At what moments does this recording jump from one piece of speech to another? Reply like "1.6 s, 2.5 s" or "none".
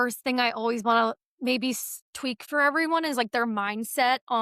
2.4 s